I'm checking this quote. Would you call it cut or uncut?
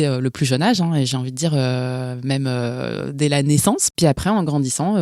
cut